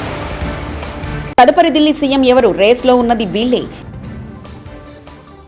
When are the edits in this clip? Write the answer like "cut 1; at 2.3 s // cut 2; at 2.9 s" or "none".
cut 1; at 1.4 s // cut 2; at 4.1 s